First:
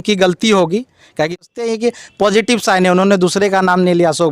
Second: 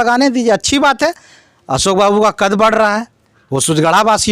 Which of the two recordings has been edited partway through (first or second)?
first